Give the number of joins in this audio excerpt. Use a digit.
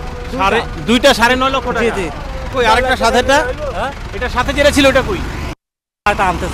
1